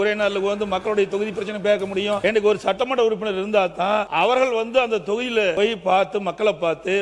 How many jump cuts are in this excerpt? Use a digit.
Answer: 3